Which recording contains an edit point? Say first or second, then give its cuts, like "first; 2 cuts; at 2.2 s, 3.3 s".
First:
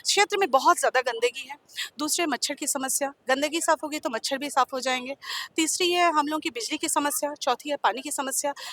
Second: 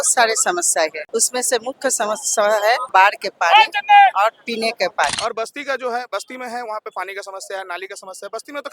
second; 3 cuts; at 1.0 s, 2.8 s, 5.1 s